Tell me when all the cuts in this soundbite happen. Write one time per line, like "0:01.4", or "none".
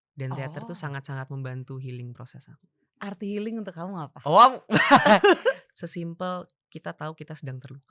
0:05.7